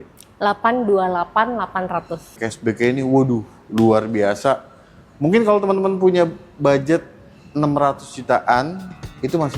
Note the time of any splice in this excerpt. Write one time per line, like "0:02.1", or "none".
0:02.4